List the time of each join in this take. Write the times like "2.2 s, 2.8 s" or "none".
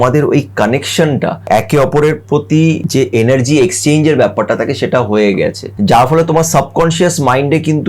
1.4 s, 2.8 s, 5.6 s